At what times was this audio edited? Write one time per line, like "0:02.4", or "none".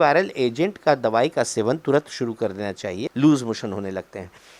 0:03.0